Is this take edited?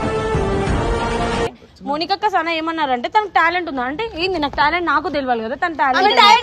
yes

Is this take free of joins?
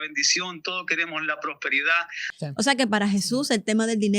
no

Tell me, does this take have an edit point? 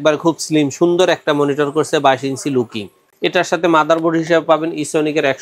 yes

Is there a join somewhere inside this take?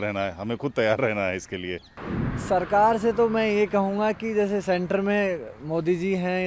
yes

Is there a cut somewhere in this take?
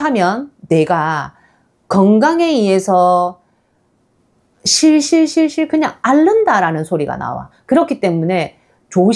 no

